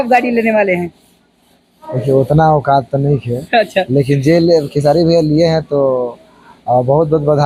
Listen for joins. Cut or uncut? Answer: uncut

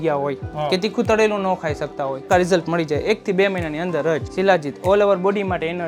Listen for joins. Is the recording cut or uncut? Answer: cut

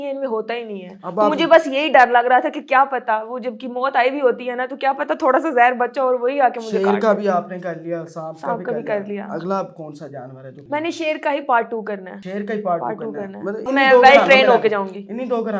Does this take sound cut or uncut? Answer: uncut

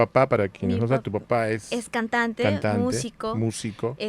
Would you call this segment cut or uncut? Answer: uncut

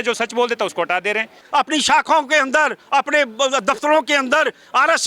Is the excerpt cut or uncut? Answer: cut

